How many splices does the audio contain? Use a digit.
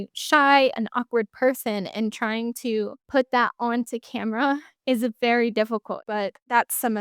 1